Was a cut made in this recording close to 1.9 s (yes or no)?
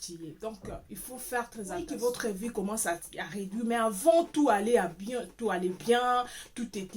yes